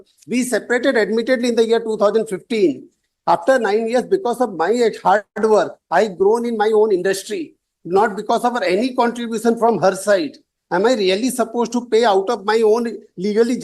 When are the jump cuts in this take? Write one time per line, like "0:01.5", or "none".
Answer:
none